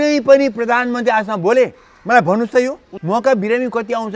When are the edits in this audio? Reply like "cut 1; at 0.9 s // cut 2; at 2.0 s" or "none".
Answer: cut 1; at 2.9 s